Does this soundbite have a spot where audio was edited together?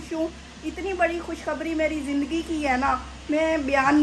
no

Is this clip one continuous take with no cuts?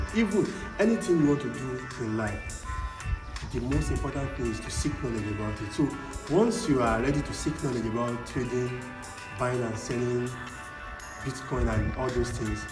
yes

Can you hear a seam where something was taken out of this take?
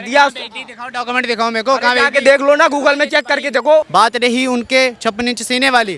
yes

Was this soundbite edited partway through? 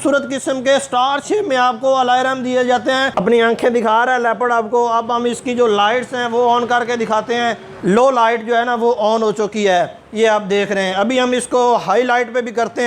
yes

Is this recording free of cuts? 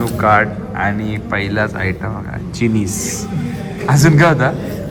yes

